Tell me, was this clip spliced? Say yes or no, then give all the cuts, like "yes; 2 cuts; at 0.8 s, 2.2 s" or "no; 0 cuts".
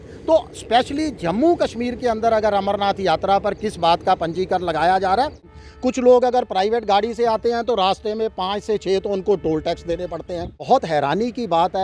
yes; 2 cuts; at 5.5 s, 10.6 s